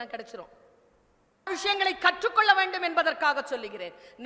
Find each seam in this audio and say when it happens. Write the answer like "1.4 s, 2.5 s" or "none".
1.5 s